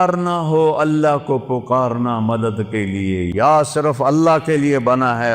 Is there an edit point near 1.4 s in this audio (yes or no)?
no